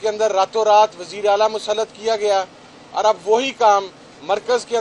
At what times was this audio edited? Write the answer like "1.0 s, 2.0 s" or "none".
none